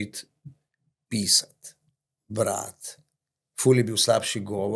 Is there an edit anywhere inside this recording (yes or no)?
no